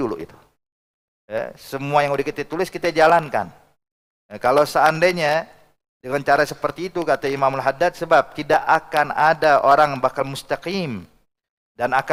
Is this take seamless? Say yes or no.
yes